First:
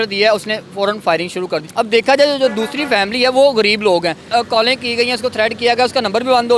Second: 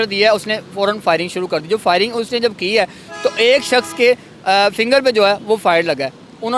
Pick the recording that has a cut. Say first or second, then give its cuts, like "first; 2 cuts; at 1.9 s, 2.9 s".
first; 2 cuts; at 1.6 s, 4.3 s